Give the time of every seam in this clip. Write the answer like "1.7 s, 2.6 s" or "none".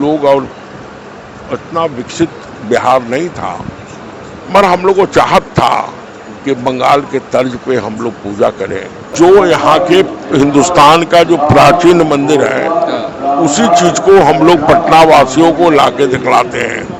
9.1 s